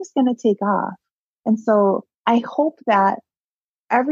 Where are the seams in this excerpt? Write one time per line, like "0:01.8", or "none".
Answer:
none